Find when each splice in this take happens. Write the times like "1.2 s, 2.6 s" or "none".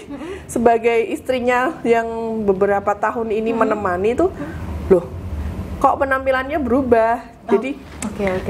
none